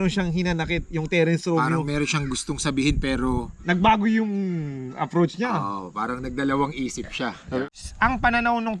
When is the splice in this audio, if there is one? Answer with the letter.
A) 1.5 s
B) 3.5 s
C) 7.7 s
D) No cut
C